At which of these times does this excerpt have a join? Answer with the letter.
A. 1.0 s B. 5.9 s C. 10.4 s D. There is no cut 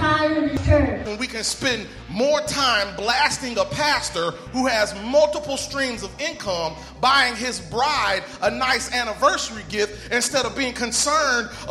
A